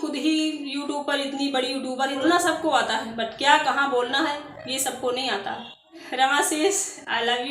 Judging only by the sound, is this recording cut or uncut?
cut